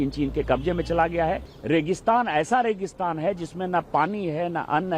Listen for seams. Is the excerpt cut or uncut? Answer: cut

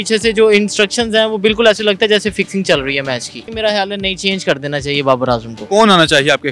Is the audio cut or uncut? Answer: cut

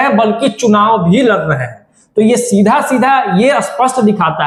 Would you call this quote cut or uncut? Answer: uncut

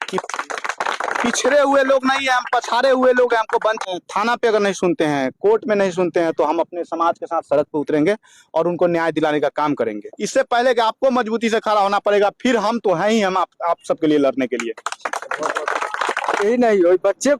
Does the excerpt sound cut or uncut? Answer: cut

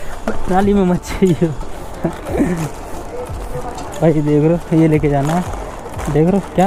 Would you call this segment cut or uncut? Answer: uncut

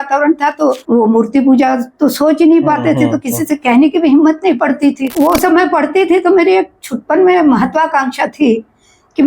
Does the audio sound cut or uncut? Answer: cut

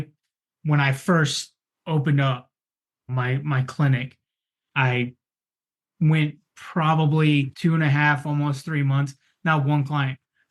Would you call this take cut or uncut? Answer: cut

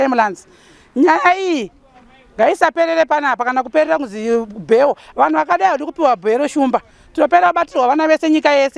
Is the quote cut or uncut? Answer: cut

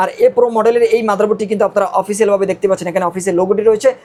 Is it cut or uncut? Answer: uncut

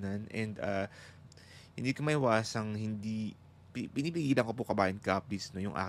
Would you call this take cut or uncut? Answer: uncut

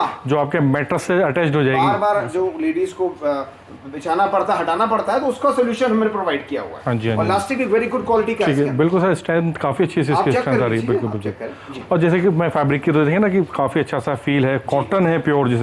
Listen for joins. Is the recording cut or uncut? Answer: uncut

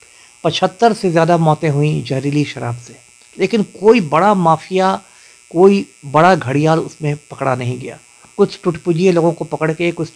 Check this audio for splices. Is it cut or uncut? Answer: uncut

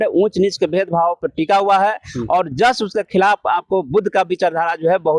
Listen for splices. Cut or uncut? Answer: uncut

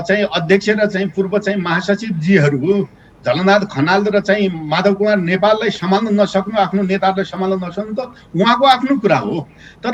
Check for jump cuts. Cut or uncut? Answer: uncut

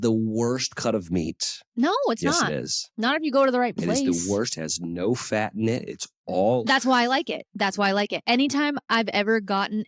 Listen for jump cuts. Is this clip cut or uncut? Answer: cut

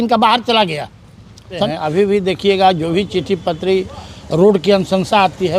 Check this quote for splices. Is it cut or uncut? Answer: cut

